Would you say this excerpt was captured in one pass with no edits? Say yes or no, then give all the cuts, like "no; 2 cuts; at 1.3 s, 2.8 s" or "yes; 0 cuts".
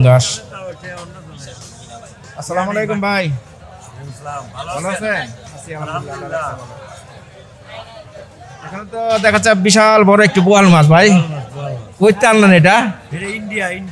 yes; 0 cuts